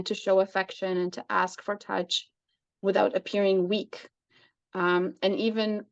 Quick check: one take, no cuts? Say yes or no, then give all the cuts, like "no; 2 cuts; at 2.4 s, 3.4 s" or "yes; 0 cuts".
yes; 0 cuts